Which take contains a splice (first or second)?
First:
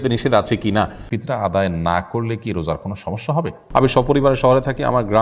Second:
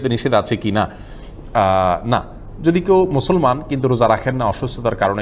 first